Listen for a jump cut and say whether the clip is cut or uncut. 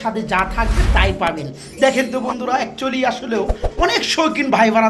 uncut